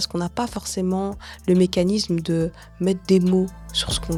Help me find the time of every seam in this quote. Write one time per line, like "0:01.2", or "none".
none